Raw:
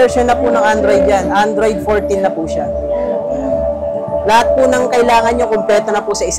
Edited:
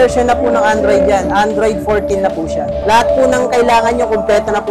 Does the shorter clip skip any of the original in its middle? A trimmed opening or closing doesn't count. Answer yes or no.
yes